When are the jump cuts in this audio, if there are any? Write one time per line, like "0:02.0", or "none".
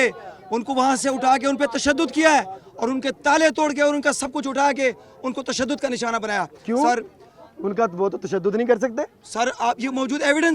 none